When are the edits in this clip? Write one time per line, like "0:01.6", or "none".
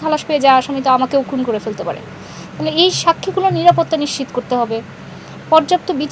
none